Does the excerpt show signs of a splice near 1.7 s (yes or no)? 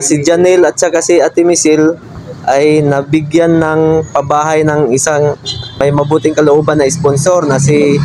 no